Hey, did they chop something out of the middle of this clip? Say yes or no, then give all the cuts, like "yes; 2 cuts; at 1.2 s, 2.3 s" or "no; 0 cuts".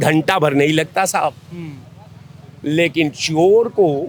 no; 0 cuts